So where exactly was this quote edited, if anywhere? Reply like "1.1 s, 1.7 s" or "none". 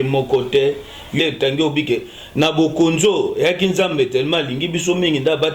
1.2 s